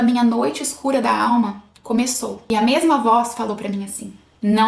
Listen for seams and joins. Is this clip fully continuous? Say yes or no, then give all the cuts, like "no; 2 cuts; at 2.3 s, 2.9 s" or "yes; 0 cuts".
no; 1 cut; at 2.3 s